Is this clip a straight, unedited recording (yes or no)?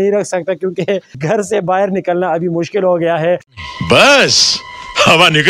yes